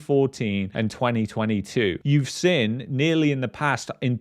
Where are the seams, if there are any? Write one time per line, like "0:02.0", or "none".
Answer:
0:02.0